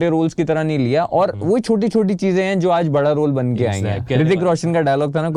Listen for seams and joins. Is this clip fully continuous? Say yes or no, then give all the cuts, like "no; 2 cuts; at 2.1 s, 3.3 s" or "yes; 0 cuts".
no; 1 cut; at 4.0 s